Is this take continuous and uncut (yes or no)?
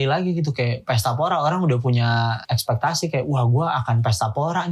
no